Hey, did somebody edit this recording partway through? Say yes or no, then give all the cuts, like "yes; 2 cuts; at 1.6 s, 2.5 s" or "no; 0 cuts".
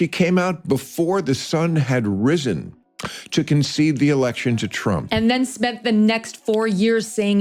no; 0 cuts